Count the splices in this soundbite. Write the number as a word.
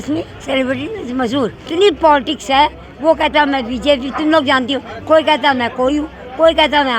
one